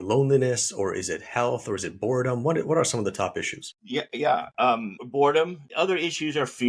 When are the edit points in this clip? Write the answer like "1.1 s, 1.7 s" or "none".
5.6 s